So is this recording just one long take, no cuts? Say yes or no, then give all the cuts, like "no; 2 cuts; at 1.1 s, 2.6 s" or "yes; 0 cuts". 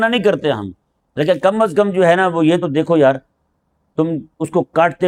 yes; 0 cuts